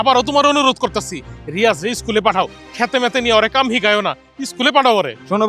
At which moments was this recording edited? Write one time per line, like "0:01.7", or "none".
none